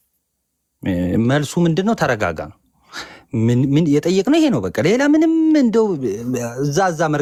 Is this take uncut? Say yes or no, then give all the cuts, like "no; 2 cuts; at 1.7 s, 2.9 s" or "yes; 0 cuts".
yes; 0 cuts